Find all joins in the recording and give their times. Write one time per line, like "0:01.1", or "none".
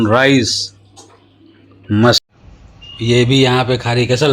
0:02.3